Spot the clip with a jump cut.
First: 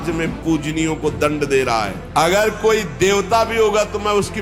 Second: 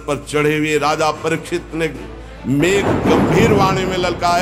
first; 1 cut; at 2.0 s

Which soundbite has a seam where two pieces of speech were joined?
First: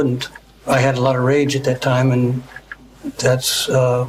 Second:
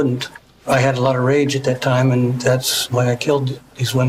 second; 1 cut; at 2.8 s

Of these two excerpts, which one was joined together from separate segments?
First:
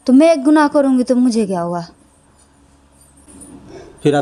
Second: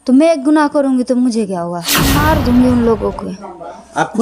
second; 1 cut; at 2.2 s

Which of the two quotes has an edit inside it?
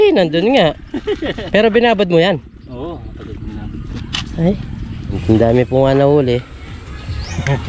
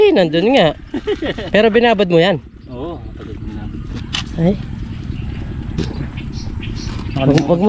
first; 1 cut; at 5.2 s

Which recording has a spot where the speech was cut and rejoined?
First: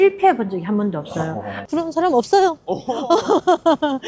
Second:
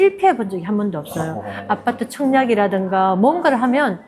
first; 1 cut; at 1.6 s

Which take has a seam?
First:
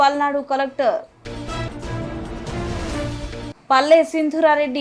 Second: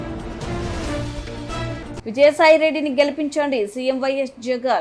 second; 1 cut; at 1.4 s

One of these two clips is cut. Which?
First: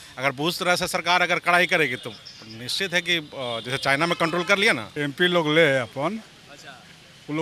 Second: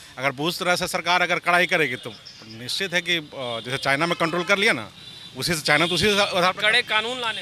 first; 1 cut; at 4.9 s

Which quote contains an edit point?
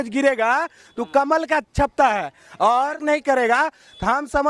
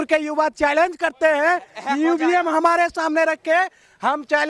first; 1 cut; at 3.0 s

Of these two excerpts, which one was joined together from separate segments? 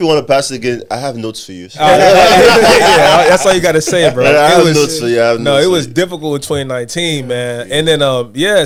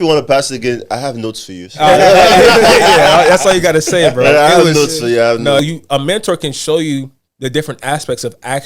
second; 1 cut; at 5.6 s

